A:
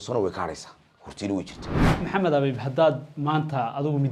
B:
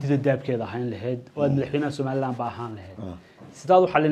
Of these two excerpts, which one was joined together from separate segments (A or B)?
A